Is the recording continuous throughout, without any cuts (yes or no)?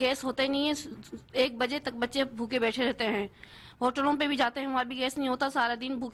yes